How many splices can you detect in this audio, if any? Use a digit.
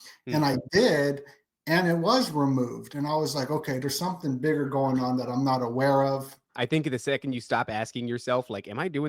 1